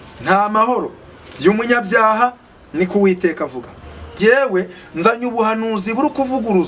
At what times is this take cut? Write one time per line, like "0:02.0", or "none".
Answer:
0:04.2